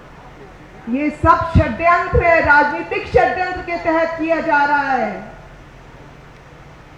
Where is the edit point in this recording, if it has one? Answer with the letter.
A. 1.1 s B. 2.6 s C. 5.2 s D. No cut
D